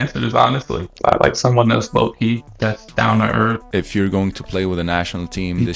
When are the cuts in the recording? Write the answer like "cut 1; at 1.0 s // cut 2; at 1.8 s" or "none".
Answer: cut 1; at 0.9 s // cut 2; at 2.5 s // cut 3; at 3.6 s